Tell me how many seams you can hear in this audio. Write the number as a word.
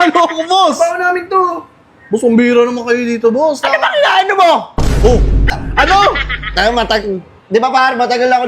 one